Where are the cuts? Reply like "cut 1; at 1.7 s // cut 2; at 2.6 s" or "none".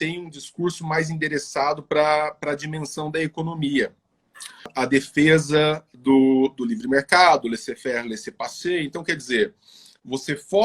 cut 1; at 4.7 s